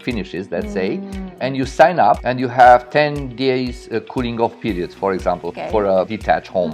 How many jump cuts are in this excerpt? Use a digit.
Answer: 2